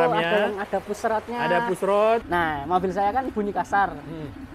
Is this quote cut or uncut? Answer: cut